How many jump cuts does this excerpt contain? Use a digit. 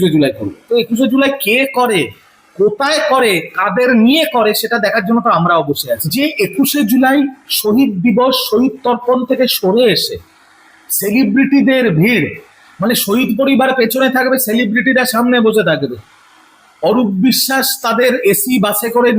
1